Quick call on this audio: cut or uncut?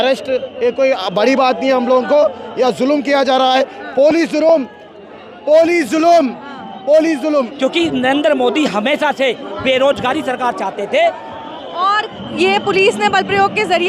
cut